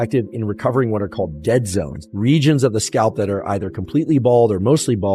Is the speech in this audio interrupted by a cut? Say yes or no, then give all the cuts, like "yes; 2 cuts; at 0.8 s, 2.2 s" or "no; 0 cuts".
yes; 1 cut; at 2.0 s